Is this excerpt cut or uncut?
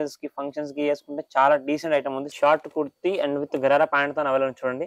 cut